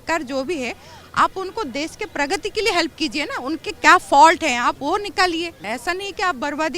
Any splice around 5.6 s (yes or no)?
yes